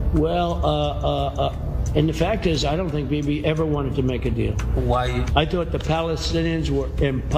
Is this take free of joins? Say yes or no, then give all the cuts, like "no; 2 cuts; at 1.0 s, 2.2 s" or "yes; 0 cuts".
yes; 0 cuts